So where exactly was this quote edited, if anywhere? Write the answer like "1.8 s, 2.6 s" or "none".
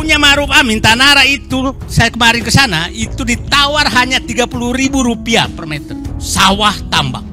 5.9 s

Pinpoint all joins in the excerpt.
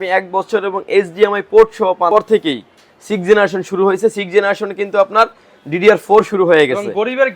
2.1 s

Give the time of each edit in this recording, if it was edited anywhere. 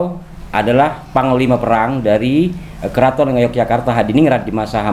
none

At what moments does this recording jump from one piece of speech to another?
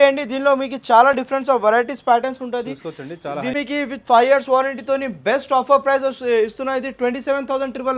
3.5 s

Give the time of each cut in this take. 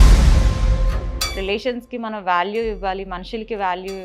1.1 s

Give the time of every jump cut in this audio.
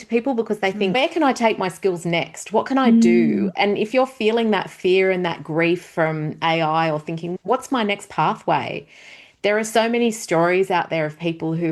1.0 s, 7.3 s

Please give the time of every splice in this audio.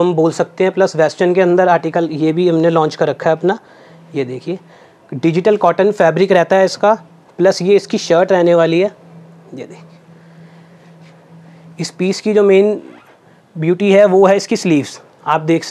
none

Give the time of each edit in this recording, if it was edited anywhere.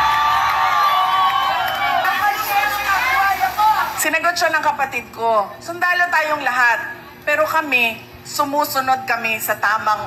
2.1 s

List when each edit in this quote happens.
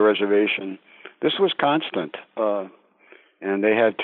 none

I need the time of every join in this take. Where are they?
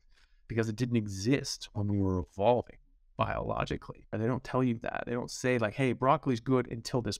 4.1 s

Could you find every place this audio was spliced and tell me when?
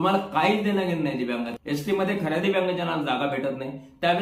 1.5 s

